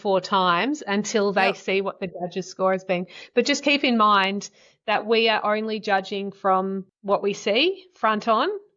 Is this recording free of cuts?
no; 1 cut; at 6.9 s

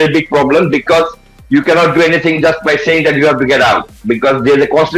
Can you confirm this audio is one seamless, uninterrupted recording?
yes; 0 cuts

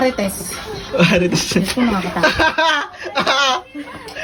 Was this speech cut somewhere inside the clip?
no; 0 cuts

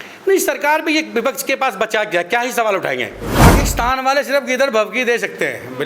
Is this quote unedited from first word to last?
no; 1 cut; at 3.2 s

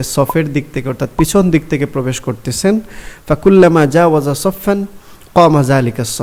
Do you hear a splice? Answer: no; 0 cuts

